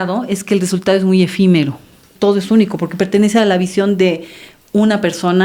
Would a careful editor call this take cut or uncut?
cut